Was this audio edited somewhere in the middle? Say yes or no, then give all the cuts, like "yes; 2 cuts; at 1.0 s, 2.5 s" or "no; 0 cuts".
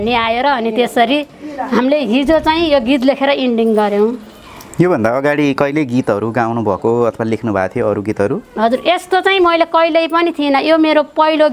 no; 0 cuts